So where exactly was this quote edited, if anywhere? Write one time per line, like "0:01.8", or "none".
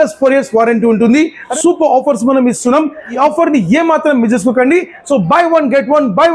0:01.4
0:03.2

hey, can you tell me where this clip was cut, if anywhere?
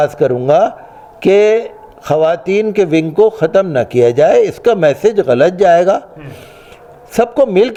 none

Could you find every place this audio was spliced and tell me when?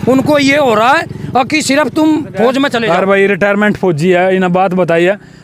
0:02.8

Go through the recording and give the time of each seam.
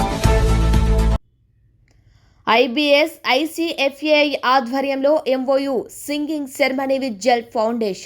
0:01.2

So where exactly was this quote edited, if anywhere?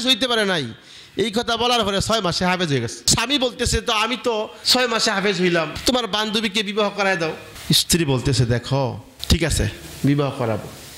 0:03.1
0:04.6
0:05.7

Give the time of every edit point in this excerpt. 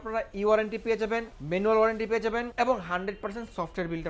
0:01.3
0:02.5

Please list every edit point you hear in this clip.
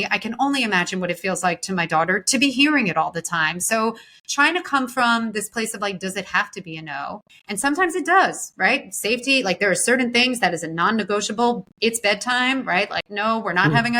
0:07.3
0:11.7
0:13.0

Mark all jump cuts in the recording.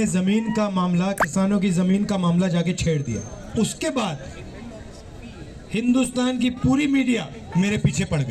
0:03.4
0:07.4

